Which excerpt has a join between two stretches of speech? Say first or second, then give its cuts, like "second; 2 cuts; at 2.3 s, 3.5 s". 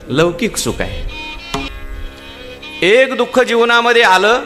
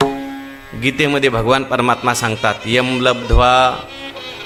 first; 1 cut; at 1.7 s